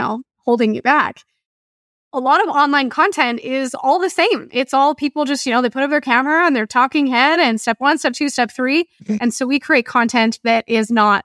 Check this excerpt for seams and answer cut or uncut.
cut